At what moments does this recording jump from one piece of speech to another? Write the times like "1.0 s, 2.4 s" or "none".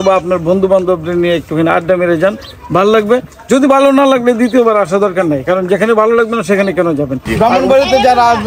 7.2 s